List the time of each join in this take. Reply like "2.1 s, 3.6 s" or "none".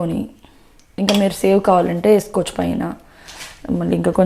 none